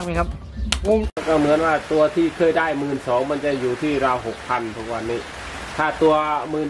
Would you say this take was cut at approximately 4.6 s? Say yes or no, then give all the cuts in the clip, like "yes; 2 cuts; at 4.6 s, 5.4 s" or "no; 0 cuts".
no; 1 cut; at 1.1 s